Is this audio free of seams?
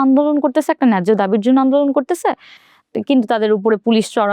yes; 0 cuts

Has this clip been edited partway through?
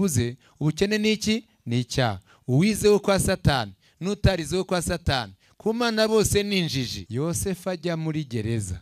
yes; 1 cut; at 7.0 s

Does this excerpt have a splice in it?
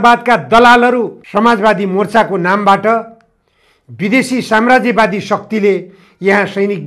yes; 1 cut; at 1.2 s

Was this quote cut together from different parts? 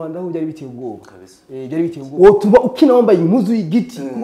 yes; 1 cut; at 2.1 s

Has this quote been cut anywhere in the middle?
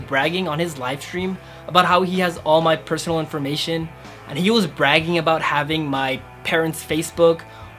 no; 0 cuts

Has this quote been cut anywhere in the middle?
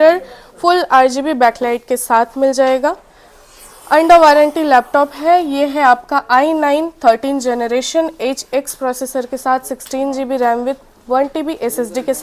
no; 0 cuts

